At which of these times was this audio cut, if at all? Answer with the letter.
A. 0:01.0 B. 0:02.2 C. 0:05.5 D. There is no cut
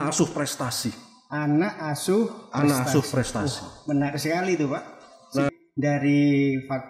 C